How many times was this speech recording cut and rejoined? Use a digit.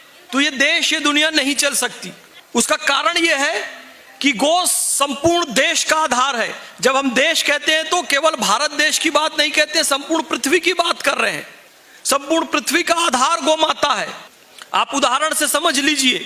0